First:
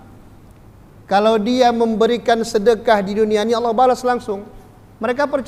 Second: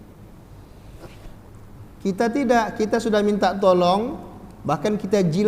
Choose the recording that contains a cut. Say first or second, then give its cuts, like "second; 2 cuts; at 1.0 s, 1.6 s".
second; 1 cut; at 1.5 s